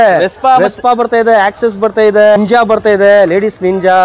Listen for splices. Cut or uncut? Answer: cut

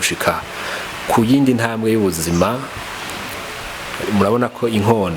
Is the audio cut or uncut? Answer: cut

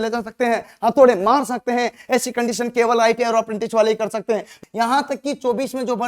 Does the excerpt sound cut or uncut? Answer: cut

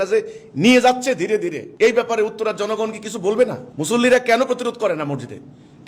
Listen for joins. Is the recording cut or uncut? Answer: uncut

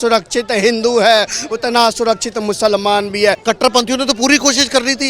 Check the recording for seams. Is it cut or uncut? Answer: cut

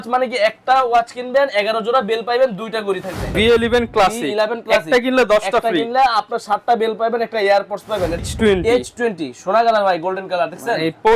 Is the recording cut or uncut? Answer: cut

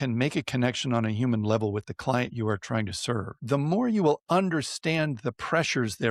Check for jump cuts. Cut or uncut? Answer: uncut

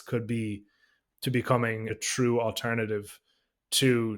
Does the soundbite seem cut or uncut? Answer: cut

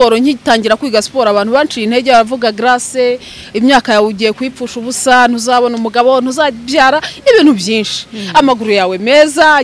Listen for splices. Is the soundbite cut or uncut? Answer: uncut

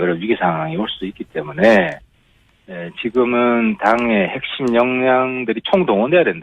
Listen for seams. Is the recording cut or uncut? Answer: uncut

